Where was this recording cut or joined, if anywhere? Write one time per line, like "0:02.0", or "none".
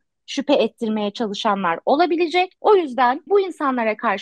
0:02.5
0:03.2